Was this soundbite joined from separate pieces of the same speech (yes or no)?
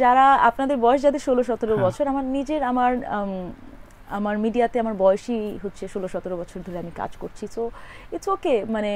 no